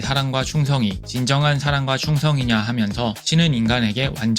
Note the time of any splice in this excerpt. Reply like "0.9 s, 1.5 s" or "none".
3.2 s